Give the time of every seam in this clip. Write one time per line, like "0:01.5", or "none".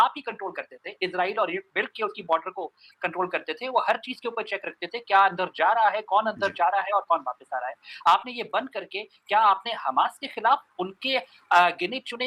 none